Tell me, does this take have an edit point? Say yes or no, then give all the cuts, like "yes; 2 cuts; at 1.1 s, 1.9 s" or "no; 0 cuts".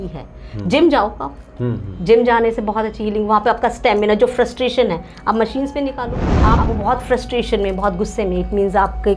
yes; 1 cut; at 6.2 s